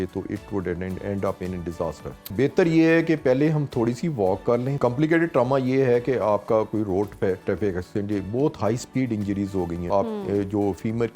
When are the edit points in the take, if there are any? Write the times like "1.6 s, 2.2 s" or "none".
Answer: 2.3 s, 4.8 s, 9.8 s